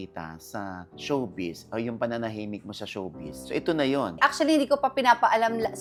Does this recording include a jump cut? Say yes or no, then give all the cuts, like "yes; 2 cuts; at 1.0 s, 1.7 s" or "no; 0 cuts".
no; 0 cuts